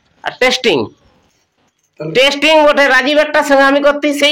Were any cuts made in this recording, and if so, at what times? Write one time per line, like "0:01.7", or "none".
none